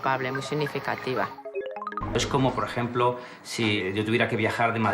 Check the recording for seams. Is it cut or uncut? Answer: cut